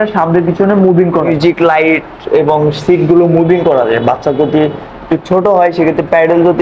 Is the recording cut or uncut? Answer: cut